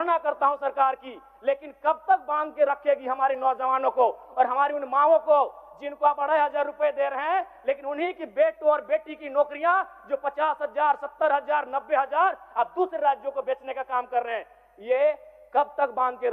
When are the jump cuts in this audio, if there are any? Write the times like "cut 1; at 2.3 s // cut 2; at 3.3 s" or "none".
none